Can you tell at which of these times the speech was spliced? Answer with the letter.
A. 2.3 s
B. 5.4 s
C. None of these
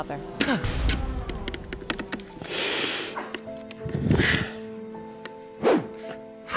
C